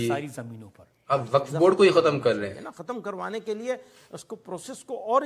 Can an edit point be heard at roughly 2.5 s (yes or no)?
yes